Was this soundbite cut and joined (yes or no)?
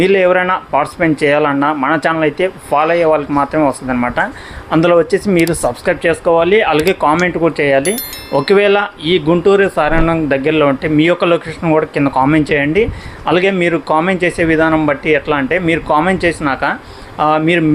no